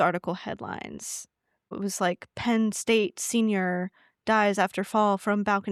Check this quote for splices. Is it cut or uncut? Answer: uncut